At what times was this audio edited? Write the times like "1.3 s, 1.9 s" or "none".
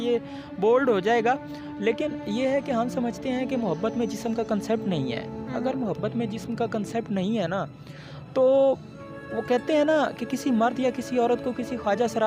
none